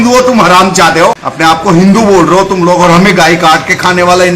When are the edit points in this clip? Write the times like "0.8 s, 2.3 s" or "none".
1.3 s